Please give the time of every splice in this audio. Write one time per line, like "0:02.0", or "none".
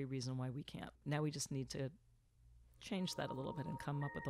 0:01.0

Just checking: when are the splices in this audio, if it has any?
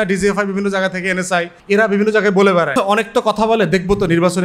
0:01.6
0:02.7

